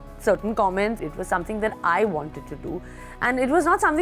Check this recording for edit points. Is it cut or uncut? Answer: cut